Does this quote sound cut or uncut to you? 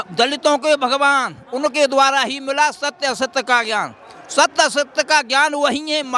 uncut